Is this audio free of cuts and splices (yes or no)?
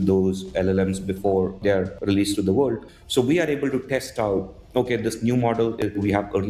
no